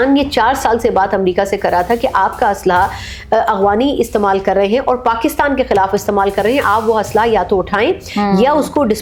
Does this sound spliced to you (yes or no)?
no